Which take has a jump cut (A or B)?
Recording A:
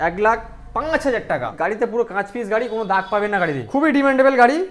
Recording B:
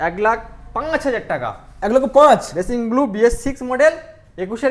A